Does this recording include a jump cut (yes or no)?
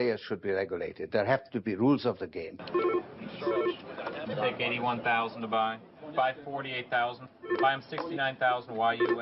no